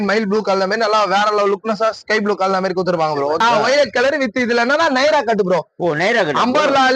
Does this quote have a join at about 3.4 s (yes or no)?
yes